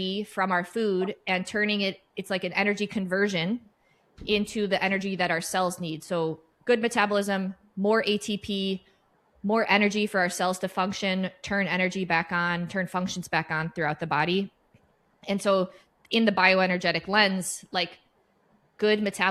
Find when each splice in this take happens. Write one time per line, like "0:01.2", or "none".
none